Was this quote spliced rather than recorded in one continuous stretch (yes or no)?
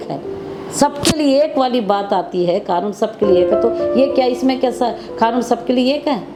no